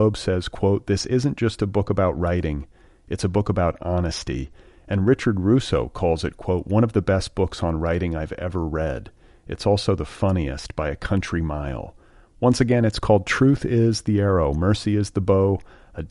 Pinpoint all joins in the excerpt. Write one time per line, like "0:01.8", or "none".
none